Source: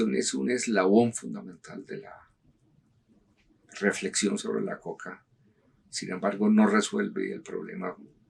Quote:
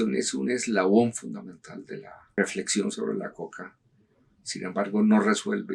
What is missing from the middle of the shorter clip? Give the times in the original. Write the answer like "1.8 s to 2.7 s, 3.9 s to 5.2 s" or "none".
2.2 s to 3.6 s